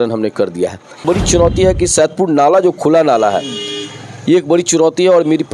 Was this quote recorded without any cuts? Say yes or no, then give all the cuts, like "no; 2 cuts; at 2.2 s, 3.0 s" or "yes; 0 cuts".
no; 1 cut; at 1.0 s